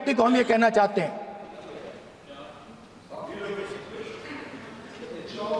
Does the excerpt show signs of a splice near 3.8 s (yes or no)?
no